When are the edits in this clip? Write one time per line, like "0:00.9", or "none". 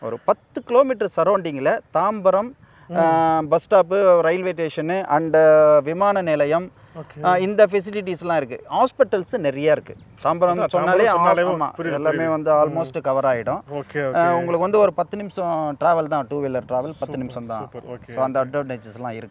none